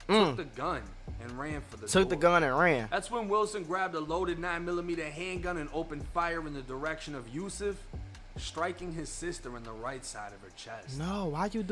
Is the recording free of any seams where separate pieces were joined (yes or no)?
yes